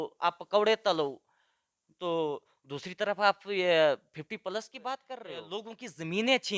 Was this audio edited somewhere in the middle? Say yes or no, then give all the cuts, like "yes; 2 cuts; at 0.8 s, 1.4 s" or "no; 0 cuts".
yes; 1 cut; at 5.4 s